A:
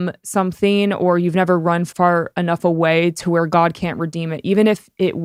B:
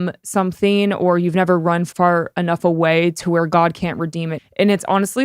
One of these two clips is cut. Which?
B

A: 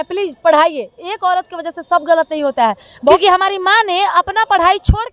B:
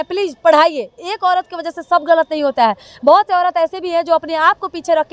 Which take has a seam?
A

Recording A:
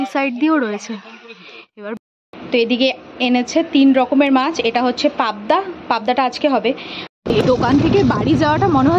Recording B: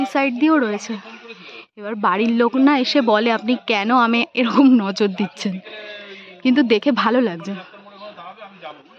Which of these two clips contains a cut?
A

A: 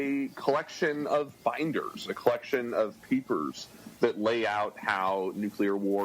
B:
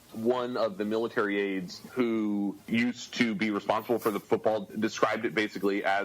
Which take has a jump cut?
B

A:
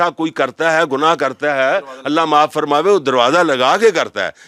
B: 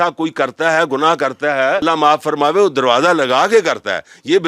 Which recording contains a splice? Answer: B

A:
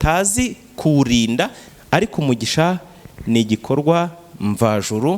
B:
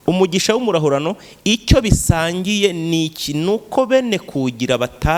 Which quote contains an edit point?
A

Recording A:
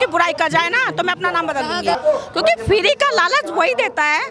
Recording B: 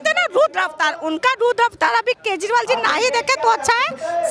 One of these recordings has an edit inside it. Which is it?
A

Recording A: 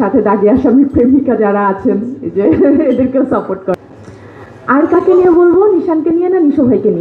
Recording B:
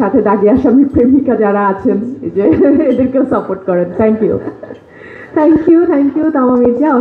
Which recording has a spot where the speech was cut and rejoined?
A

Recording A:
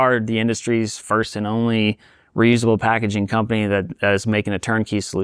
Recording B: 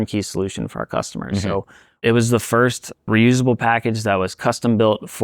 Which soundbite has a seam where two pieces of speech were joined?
B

